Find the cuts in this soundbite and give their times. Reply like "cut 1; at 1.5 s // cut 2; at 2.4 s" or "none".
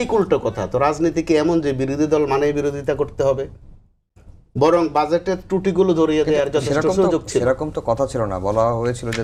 none